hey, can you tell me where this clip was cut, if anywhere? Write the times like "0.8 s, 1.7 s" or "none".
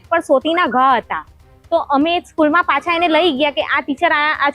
none